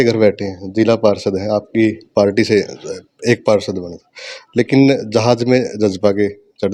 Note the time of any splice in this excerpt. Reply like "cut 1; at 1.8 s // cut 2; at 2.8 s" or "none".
none